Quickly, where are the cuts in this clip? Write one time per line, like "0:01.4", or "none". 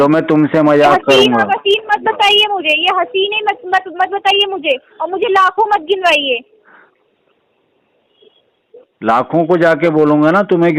none